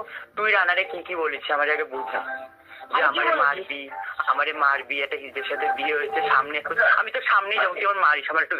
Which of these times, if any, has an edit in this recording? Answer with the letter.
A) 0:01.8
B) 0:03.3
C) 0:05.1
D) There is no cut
D